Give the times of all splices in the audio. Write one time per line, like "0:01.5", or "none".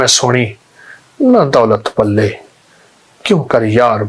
none